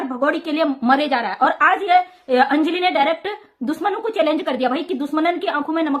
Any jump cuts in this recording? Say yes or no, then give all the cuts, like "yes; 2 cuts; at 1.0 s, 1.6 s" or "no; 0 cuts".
no; 0 cuts